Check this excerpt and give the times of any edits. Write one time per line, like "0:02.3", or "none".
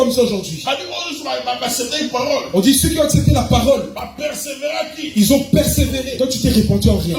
0:06.1